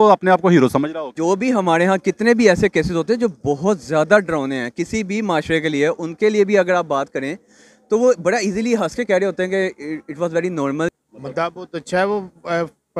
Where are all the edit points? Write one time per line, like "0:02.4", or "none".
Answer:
0:01.1
0:10.9